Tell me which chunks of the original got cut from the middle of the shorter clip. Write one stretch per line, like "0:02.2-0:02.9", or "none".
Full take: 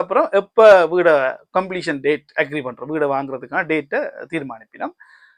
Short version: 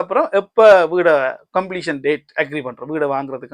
none